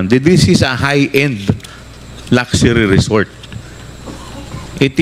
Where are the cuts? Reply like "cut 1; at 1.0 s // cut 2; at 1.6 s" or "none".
none